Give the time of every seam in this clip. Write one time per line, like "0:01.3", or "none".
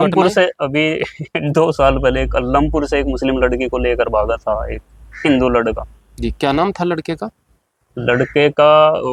none